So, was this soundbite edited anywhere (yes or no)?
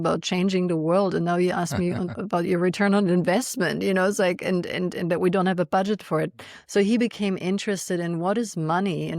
no